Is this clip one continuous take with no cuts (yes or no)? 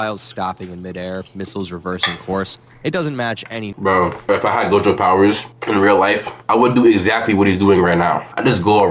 yes